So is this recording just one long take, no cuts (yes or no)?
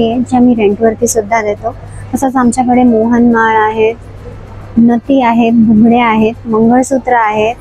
yes